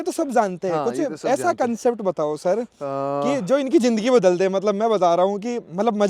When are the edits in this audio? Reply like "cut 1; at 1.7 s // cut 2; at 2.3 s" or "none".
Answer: none